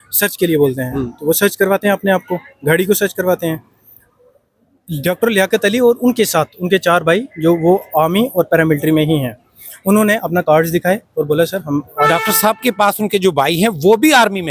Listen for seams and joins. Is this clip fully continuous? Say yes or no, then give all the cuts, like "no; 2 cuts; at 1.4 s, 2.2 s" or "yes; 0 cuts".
yes; 0 cuts